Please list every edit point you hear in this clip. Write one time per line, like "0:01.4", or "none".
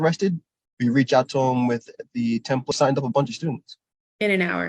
0:02.7